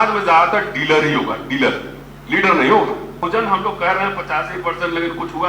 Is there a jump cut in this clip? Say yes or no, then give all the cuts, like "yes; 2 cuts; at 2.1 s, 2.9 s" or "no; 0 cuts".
yes; 1 cut; at 3.2 s